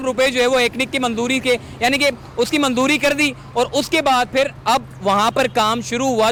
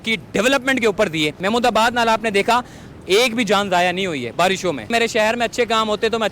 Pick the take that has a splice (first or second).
second